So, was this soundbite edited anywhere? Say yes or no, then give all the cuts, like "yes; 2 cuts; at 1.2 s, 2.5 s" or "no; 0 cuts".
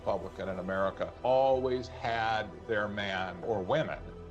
yes; 2 cuts; at 1.1 s, 3.4 s